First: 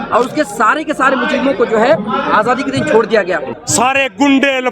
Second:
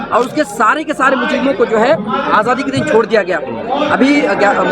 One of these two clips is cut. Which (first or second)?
first